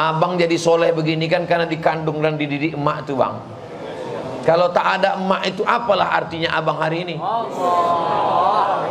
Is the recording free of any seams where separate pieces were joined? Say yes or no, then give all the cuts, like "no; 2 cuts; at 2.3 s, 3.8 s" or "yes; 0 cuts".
yes; 0 cuts